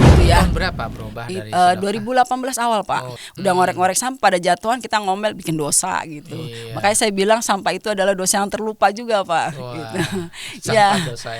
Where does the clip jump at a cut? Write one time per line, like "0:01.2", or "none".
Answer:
0:03.2